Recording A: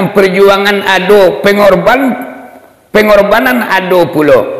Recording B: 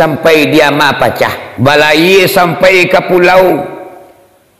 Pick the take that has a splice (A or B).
B